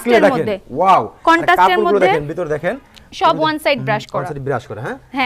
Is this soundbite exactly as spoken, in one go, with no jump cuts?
yes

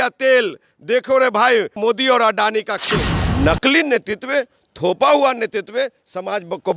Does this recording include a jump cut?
yes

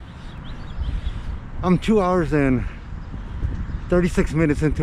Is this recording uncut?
yes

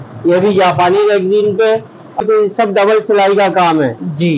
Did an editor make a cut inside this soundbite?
yes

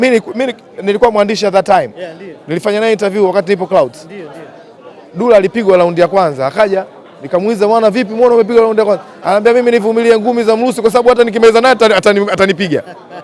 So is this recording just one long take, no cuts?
yes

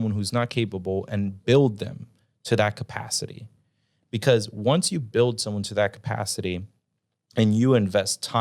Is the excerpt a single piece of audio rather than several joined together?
yes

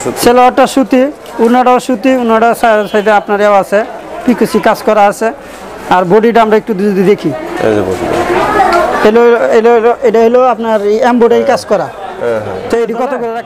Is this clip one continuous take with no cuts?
yes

